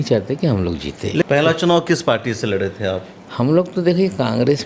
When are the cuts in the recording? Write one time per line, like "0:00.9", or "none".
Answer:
0:01.2

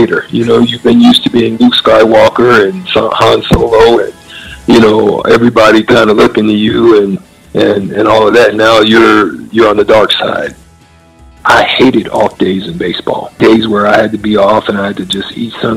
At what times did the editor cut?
0:10.7
0:13.3

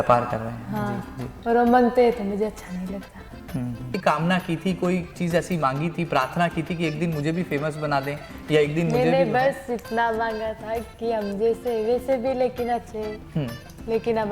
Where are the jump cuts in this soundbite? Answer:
0:03.9

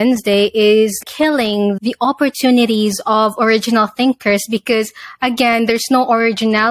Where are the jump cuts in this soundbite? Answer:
none

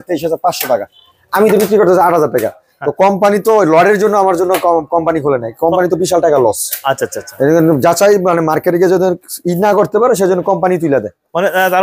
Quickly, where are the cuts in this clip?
none

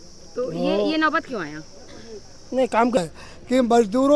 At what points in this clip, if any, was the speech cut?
0:03.0

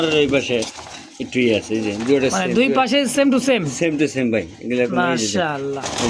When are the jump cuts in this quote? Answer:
none

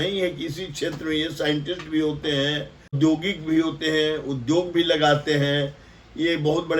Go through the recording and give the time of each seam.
0:02.9

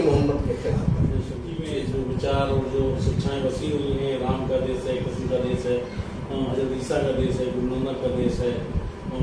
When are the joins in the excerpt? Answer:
0:01.5

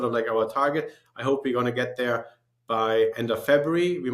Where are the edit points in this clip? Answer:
0:03.2

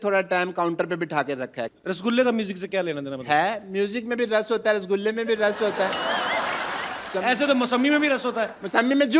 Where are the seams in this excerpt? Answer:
0:07.0

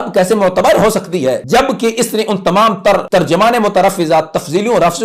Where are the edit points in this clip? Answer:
0:01.4
0:03.0

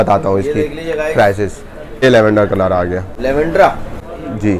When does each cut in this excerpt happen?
0:02.0

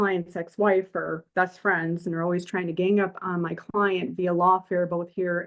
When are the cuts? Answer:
none

